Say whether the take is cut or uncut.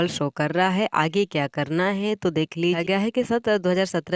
cut